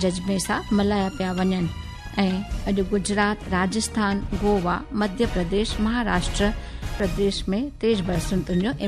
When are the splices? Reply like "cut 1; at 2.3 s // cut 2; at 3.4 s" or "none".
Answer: cut 1; at 7.0 s